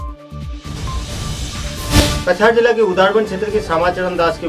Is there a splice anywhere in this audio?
yes; 1 cut; at 1.9 s

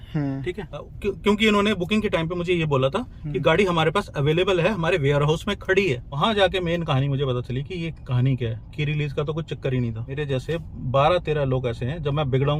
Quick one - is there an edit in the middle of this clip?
yes; 3 cuts; at 0.9 s, 6.2 s, 10.2 s

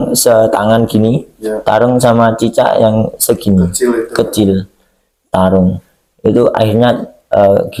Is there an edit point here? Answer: no; 0 cuts

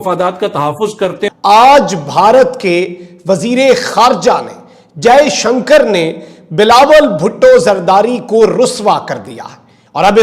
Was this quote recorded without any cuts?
no; 1 cut; at 1.3 s

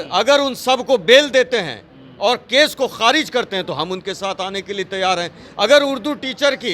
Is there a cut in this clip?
no; 0 cuts

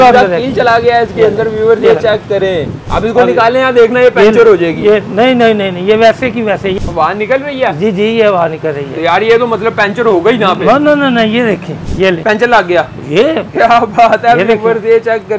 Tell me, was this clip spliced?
no; 0 cuts

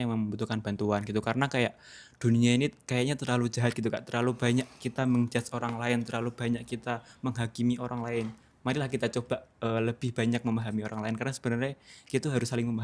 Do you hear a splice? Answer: no; 0 cuts

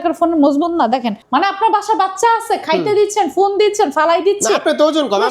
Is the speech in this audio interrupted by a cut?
yes; 1 cut; at 1.2 s

